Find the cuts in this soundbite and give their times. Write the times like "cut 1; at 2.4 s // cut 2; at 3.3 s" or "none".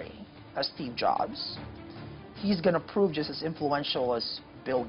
none